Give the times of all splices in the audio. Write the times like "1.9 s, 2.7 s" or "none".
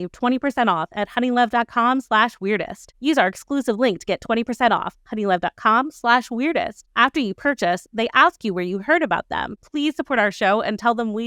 none